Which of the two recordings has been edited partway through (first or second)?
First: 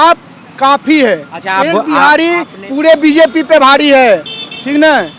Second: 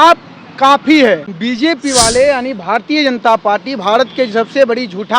second